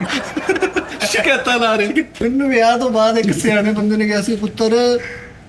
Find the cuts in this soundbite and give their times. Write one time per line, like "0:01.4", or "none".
0:02.1